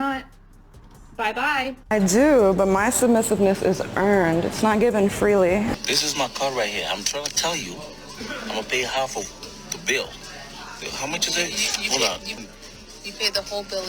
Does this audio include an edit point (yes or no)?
yes